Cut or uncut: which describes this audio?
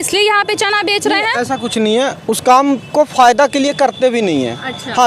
uncut